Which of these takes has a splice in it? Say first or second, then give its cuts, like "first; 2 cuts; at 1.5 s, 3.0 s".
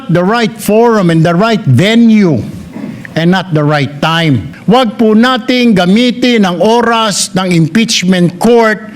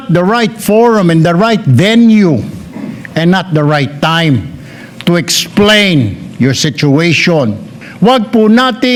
first; 1 cut; at 4.5 s